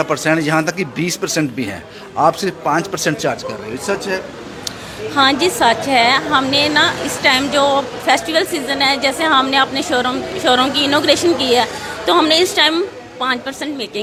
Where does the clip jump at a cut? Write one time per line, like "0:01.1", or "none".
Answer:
none